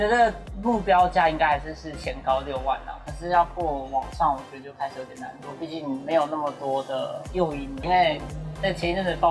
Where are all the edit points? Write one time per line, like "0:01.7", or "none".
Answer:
none